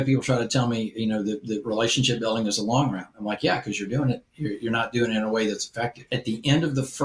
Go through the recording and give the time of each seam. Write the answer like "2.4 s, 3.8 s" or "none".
6.0 s